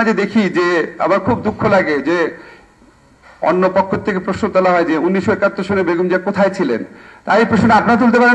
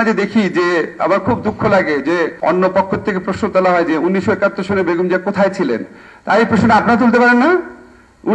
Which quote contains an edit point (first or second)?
second